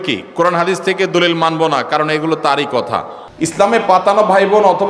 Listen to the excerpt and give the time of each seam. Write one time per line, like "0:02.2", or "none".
0:03.2